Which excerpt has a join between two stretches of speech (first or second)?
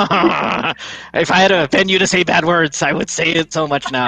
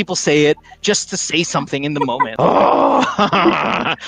second